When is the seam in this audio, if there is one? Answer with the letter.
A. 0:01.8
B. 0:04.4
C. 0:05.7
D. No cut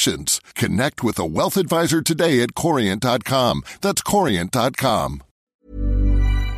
C